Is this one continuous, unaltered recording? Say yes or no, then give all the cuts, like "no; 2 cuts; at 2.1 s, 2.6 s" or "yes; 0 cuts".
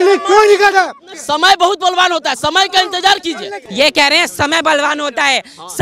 no; 1 cut; at 3.6 s